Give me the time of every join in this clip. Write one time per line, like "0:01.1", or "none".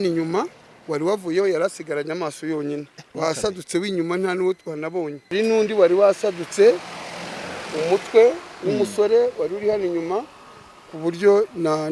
0:03.0
0:05.3